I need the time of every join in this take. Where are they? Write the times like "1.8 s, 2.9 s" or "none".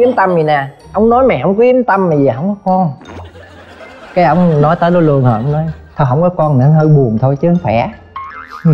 none